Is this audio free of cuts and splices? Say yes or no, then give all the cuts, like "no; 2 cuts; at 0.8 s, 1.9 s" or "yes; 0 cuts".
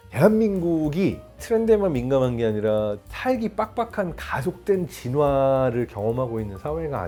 yes; 0 cuts